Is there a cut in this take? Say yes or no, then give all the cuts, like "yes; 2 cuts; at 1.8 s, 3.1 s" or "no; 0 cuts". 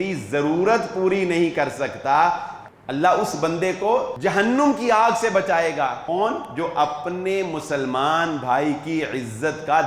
yes; 3 cuts; at 2.5 s, 4.1 s, 6.0 s